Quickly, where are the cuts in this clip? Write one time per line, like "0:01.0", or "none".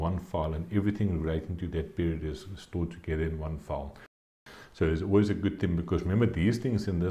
0:04.3

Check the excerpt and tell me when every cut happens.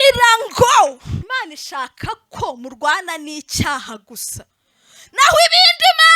0:01.2

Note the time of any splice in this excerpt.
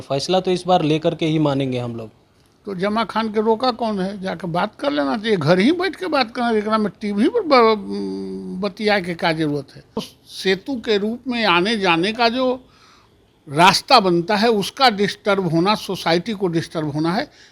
0:10.2

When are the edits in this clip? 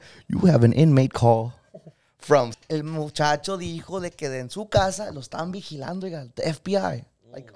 0:02.4

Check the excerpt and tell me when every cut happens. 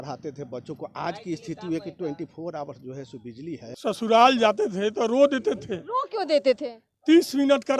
0:03.7

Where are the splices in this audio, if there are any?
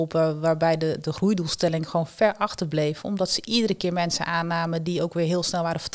none

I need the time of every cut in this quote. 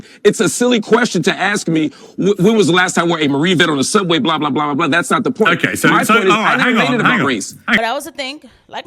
0:07.8

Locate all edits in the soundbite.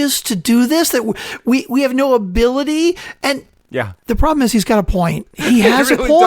0:03.4

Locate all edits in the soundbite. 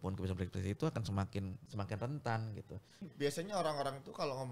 0:01.6
0:03.1

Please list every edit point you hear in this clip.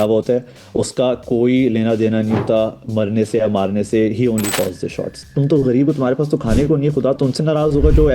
0:05.3

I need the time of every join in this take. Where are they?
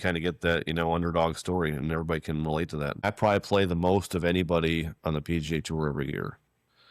0:03.0

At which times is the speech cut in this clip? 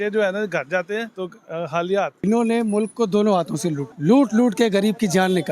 0:01.1
0:02.2
0:03.9

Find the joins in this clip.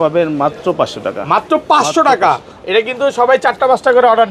none

